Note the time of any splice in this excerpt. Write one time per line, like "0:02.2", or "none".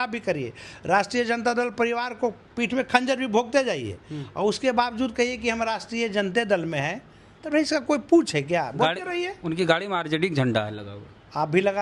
none